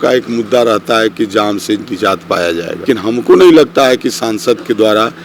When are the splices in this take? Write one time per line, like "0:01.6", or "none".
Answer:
0:02.8